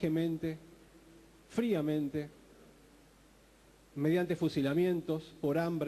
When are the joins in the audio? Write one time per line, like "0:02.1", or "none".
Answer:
0:04.6